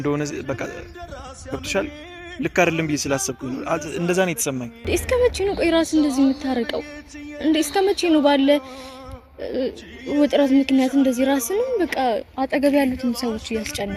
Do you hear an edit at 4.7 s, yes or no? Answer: yes